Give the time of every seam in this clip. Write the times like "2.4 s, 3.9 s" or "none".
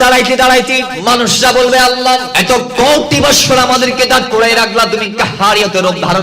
0.9 s, 2.3 s